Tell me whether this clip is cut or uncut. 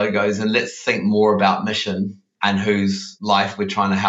cut